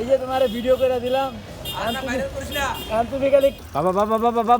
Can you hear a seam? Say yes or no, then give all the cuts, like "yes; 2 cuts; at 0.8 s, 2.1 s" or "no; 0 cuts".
yes; 1 cut; at 3.6 s